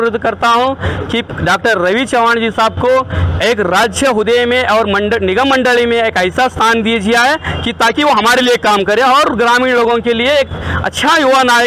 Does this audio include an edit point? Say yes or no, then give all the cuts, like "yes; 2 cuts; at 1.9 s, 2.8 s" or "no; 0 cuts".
no; 0 cuts